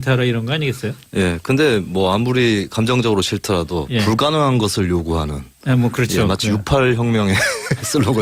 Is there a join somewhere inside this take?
no; 0 cuts

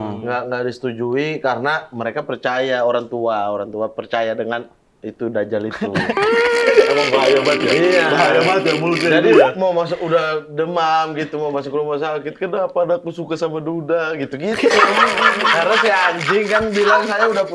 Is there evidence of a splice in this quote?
no; 0 cuts

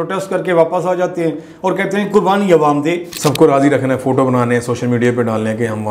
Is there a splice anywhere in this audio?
yes; 1 cut; at 3.1 s

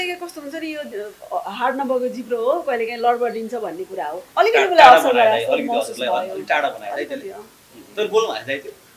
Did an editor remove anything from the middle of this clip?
yes; 1 cut; at 4.2 s

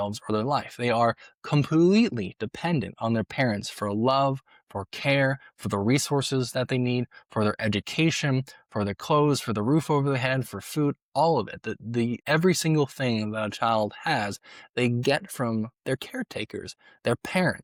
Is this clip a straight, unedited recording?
yes; 0 cuts

